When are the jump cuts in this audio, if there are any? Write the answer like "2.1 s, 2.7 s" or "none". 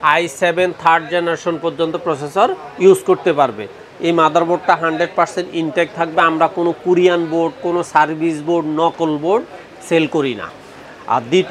none